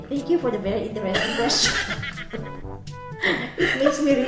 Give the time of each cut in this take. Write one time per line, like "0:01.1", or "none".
none